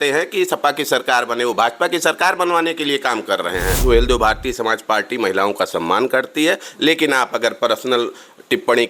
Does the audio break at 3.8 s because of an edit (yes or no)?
yes